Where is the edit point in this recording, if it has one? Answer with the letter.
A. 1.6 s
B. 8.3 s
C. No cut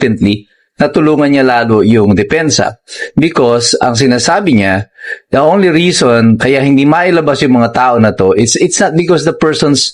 C